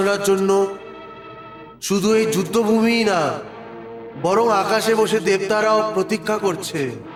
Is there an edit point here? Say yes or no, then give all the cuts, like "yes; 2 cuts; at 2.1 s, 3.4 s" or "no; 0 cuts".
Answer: no; 0 cuts